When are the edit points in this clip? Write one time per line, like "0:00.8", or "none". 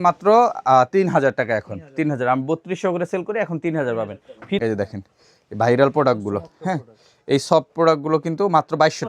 0:04.6

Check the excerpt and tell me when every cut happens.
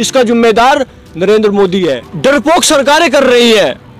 0:02.1

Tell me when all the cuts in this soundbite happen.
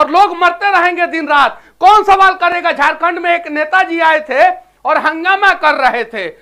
none

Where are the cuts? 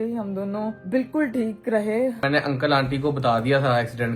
0:02.2

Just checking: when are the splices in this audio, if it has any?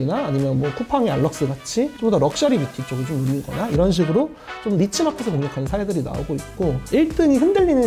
0:06.8

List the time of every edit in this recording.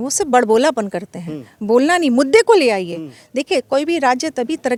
none

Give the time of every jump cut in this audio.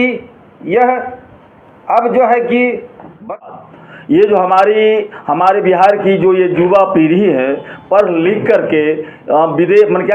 0:03.4

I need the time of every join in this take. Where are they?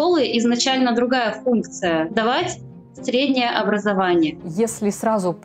0:02.1
0:04.4

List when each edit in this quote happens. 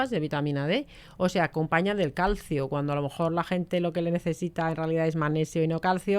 none

